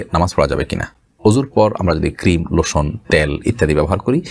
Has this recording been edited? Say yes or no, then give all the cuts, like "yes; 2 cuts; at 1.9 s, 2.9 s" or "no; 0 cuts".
no; 0 cuts